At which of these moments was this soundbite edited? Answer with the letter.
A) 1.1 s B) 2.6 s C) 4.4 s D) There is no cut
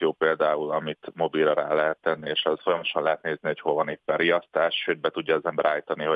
B